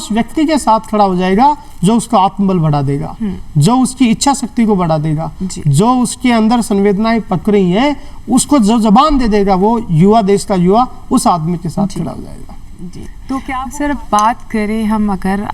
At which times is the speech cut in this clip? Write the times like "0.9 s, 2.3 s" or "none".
none